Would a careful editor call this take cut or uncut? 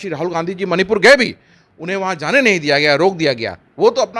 uncut